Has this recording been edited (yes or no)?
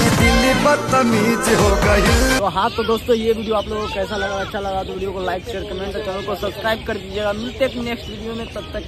no